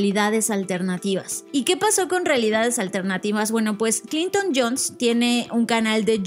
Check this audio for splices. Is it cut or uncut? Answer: cut